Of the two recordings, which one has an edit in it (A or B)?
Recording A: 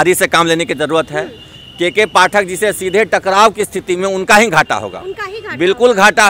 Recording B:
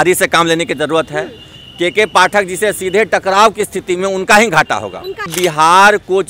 B